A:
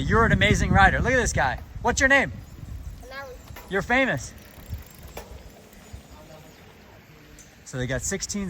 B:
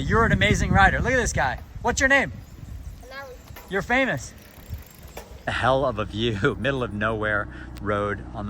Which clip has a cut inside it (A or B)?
B